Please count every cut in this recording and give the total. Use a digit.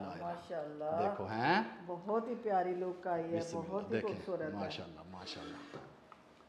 0